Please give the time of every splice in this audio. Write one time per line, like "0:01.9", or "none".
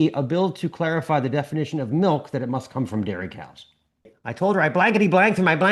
0:04.2